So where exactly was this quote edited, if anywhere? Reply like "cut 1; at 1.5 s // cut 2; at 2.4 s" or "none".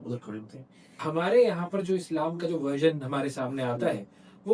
cut 1; at 1.0 s